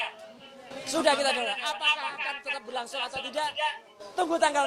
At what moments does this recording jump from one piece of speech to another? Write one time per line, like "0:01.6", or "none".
none